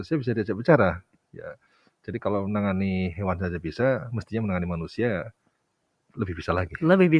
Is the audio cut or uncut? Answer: uncut